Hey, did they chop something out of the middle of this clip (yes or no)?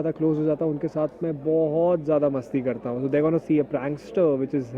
no